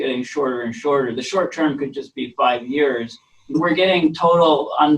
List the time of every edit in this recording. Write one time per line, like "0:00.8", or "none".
0:03.6